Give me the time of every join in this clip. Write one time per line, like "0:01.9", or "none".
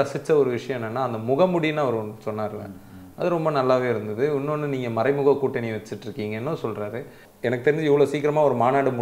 0:07.2